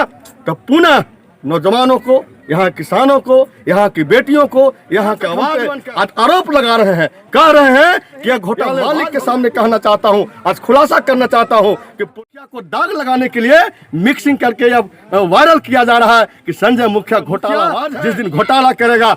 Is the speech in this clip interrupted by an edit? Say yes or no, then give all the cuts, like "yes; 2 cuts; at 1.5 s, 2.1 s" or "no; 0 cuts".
yes; 4 cuts; at 5.5 s, 8.8 s, 12.2 s, 17.8 s